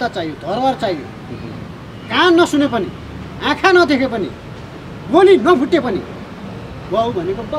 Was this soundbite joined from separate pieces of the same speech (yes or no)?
no